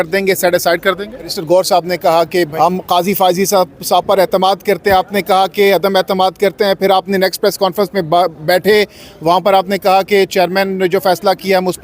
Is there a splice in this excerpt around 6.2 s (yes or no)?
no